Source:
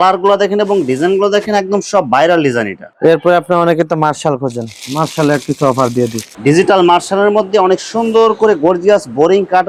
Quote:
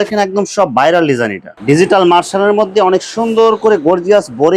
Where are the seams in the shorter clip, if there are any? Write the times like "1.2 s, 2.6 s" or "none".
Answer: 1.5 s

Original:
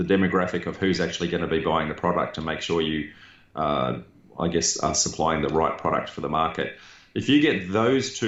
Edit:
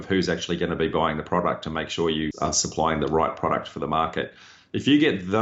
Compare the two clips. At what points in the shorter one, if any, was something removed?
2.3 s

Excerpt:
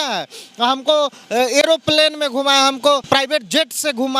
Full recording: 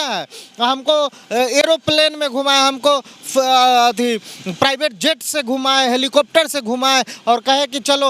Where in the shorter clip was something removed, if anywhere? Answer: 3.0 s

